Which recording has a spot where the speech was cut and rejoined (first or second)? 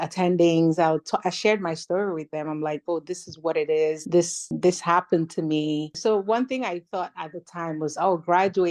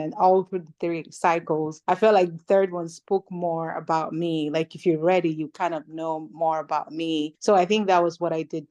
second